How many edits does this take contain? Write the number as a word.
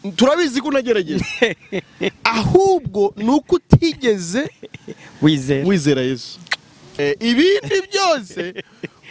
one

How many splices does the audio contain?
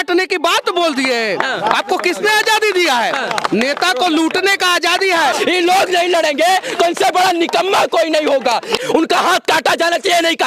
two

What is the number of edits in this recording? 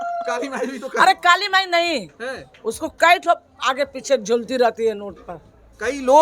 zero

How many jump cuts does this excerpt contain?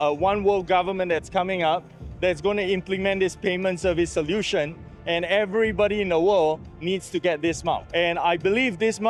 zero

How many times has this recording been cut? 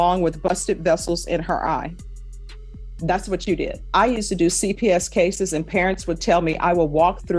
one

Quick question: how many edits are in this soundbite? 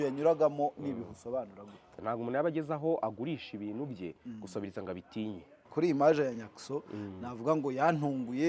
two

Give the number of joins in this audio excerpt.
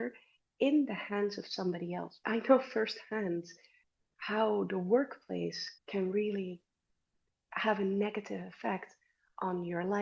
one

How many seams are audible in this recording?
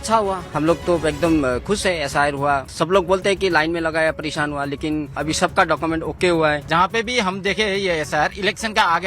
three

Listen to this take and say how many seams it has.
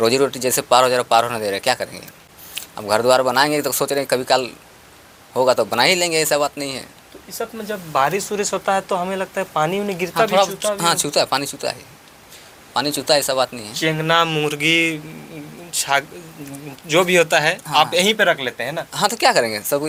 zero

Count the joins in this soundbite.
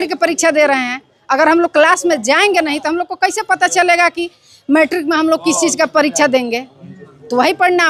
zero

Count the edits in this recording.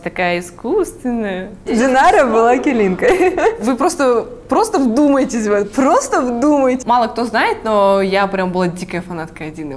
two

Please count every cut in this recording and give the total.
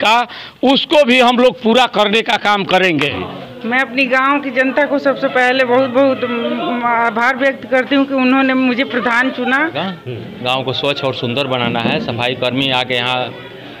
two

